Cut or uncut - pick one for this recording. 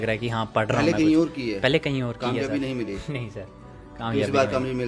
uncut